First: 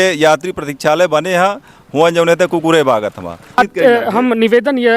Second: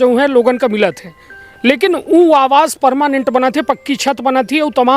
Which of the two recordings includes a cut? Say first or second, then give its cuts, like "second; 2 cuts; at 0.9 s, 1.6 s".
first; 1 cut; at 3.6 s